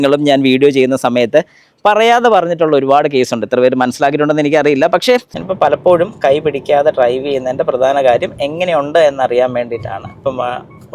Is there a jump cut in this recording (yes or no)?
yes